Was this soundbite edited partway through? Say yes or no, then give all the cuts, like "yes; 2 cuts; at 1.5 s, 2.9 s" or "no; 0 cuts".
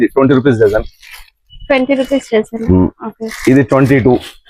no; 0 cuts